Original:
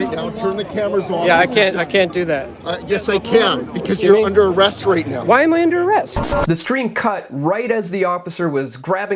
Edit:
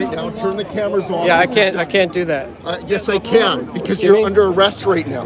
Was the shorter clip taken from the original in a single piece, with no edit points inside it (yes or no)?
yes